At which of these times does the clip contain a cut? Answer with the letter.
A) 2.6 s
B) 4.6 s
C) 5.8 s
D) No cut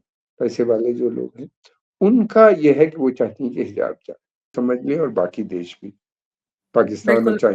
B